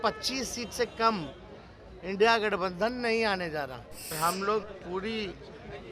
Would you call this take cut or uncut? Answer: cut